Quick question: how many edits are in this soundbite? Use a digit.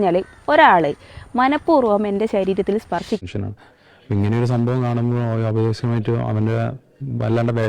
1